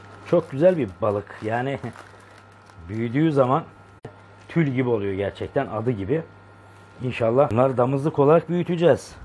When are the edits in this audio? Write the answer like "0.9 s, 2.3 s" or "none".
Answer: 4.2 s, 7.5 s

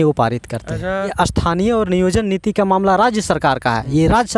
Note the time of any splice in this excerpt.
1.1 s

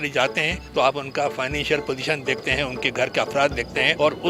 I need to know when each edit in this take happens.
none

